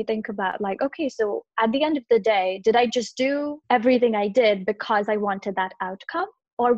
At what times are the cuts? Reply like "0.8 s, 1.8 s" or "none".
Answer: 3.6 s